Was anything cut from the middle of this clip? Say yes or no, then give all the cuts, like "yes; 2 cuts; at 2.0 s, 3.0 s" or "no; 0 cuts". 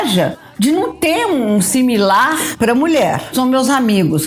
yes; 2 cuts; at 2.5 s, 3.3 s